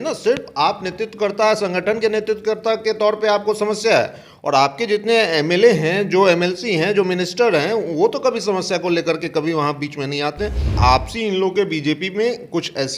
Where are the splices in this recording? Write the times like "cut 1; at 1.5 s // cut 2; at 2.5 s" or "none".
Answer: cut 1; at 10.8 s